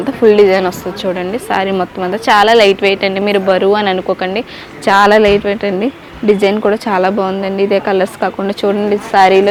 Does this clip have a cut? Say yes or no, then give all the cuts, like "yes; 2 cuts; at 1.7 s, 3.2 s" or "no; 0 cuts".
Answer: no; 0 cuts